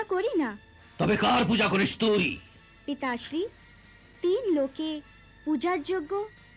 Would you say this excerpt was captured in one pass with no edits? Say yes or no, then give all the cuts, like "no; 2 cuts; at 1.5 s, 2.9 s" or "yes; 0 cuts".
yes; 0 cuts